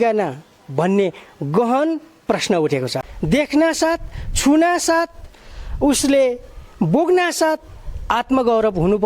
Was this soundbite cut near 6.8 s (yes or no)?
no